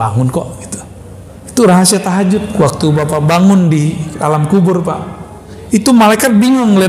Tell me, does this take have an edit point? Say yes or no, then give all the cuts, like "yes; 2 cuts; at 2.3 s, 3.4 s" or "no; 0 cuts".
yes; 1 cut; at 2.5 s